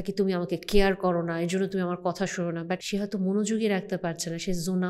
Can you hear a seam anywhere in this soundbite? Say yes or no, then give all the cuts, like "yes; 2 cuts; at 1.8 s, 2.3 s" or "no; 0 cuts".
yes; 1 cut; at 2.8 s